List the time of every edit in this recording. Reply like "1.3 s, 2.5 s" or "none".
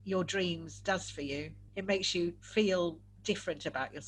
1.6 s, 2.4 s